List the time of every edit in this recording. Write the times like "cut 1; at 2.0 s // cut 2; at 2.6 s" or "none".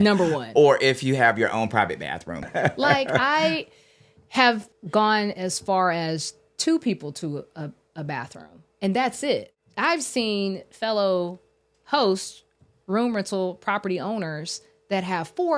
cut 1; at 2.5 s // cut 2; at 4.7 s // cut 3; at 9.5 s